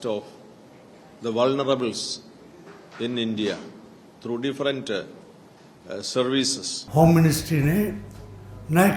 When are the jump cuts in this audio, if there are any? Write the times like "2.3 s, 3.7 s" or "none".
6.8 s

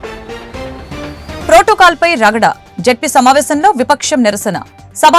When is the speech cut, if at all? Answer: 1.4 s

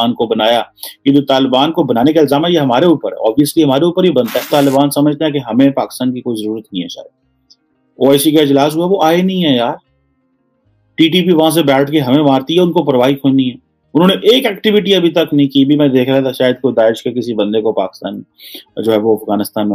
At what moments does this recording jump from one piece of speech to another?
4.5 s

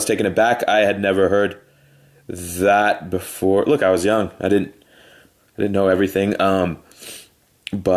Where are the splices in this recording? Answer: 5.6 s

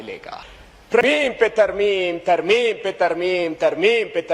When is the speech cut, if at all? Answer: 1.0 s

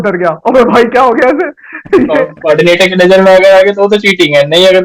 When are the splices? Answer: 2.4 s

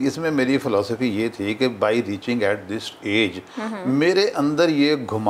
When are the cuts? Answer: none

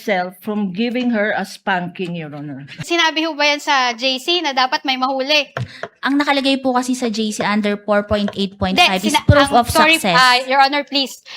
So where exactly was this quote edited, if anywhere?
2.8 s

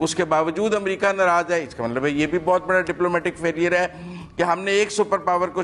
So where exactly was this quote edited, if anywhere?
none

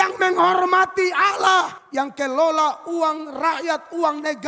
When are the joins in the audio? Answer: 1.8 s

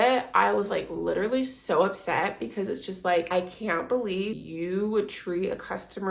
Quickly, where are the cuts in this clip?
3.3 s, 4.4 s

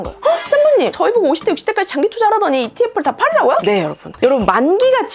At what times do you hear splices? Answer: 4.2 s

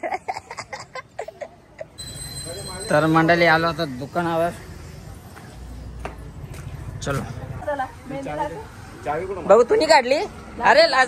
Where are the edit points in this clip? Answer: none

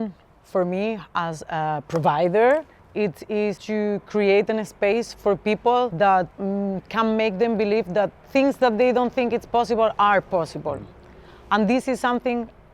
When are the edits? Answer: 3.6 s, 5.9 s

